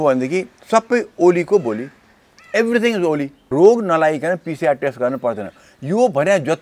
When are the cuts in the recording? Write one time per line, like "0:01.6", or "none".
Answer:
0:03.3